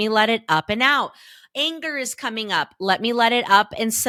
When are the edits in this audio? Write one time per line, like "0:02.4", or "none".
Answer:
none